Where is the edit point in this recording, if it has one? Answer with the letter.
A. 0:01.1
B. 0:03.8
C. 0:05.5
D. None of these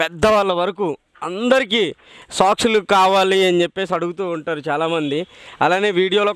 D